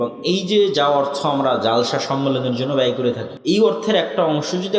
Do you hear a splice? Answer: yes; 1 cut; at 3.3 s

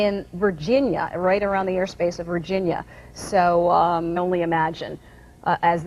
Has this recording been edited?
no; 0 cuts

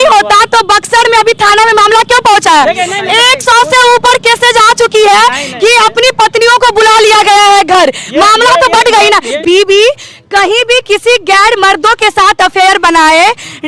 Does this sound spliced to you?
yes; 1 cut; at 9.4 s

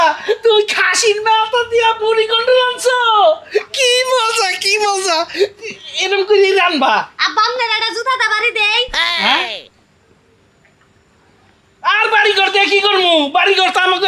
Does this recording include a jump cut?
no; 0 cuts

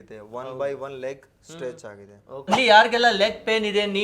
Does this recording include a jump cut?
yes; 1 cut; at 2.4 s

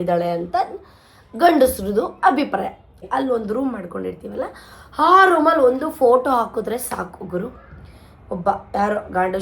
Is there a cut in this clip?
yes; 1 cut; at 2.9 s

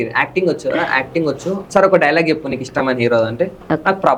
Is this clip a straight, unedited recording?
yes; 0 cuts

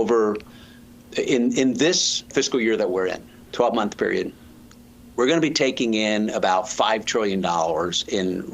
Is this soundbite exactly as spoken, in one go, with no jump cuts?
no; 1 cut; at 2.3 s

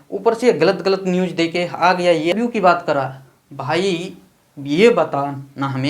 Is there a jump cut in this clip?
yes; 1 cut; at 2.3 s

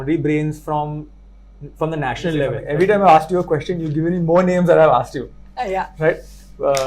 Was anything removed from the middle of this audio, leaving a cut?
yes; 1 cut; at 2.6 s

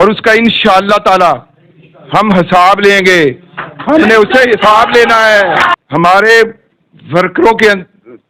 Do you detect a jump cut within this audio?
yes; 1 cut; at 5.7 s

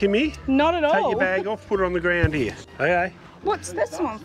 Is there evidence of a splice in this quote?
no; 0 cuts

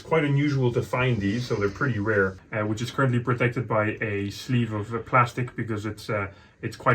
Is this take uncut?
no; 1 cut; at 2.4 s

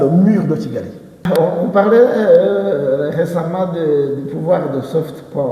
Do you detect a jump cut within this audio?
yes; 1 cut; at 1.2 s

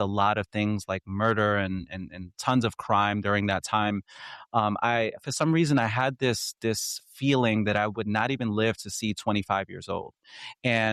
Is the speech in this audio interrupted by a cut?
no; 0 cuts

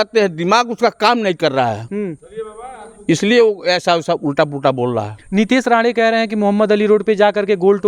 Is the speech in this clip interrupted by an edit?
no; 0 cuts

